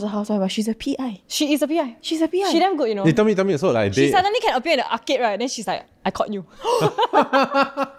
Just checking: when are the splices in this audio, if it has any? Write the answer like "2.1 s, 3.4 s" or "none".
none